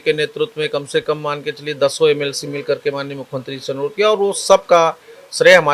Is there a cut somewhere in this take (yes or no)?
no